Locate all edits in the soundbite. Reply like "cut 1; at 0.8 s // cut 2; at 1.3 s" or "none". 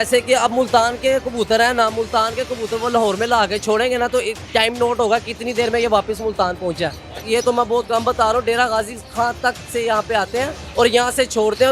cut 1; at 7.1 s // cut 2; at 10.6 s